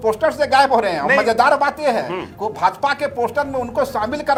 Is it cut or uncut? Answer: uncut